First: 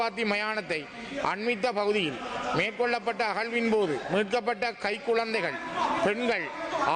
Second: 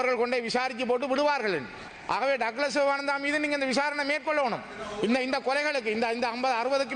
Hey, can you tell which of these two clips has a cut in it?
second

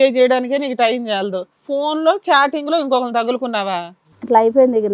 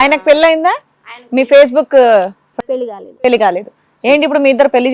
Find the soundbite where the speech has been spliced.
first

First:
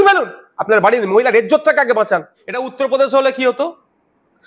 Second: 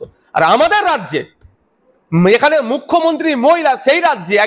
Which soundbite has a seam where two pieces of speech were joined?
first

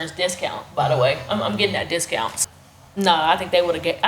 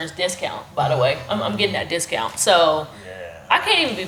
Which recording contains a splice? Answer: first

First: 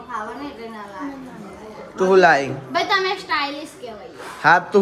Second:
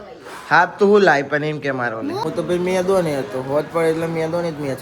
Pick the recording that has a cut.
second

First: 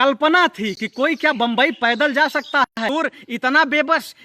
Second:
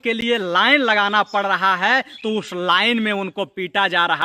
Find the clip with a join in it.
first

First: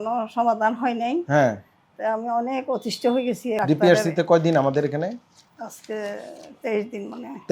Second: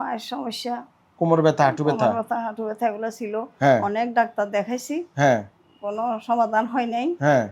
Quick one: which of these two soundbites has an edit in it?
first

